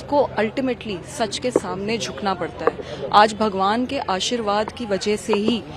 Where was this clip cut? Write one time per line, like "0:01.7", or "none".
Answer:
none